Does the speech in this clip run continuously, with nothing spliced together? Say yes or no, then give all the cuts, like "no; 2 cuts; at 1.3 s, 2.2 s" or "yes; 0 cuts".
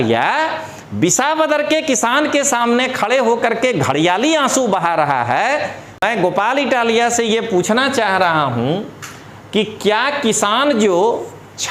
no; 1 cut; at 6.0 s